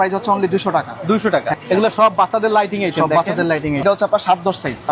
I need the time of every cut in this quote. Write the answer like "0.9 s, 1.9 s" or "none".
1.6 s, 3.8 s